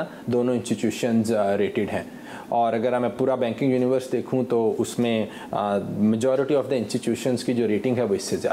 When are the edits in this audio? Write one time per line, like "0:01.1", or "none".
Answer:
none